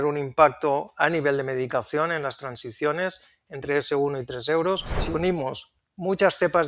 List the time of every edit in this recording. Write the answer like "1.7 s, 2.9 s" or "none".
4.9 s